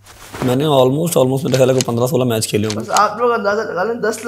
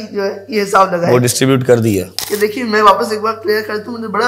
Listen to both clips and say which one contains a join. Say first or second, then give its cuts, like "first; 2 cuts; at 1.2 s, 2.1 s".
second; 1 cut; at 2.2 s